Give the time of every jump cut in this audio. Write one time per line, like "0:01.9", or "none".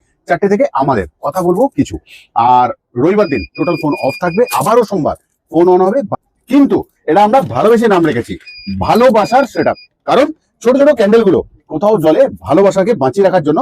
0:06.1